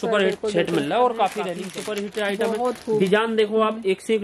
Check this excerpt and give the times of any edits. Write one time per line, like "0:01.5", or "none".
0:01.5

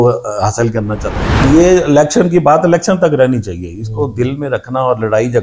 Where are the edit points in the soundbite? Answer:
0:01.4

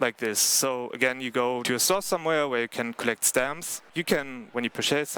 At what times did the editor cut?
0:01.6
0:03.9

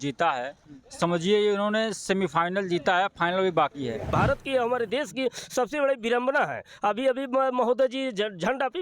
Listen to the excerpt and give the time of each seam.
0:04.1

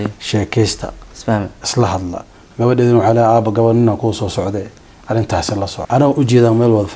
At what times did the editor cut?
0:05.8

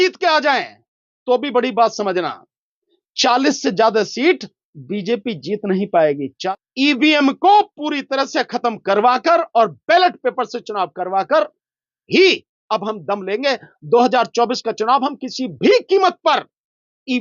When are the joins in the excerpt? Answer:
0:06.3

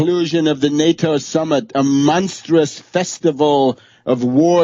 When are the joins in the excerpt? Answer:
none

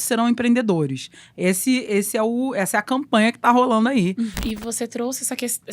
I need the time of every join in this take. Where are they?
0:04.4

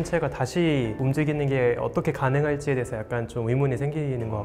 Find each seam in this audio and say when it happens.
none

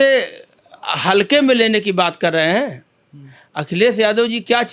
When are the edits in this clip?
none

